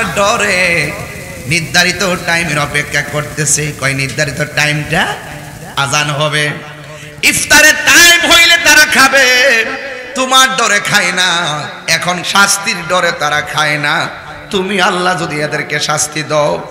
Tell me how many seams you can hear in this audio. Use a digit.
1